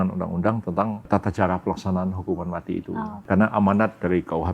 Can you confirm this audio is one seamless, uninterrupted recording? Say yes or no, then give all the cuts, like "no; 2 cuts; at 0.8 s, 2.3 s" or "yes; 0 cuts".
no; 2 cuts; at 1.1 s, 3.2 s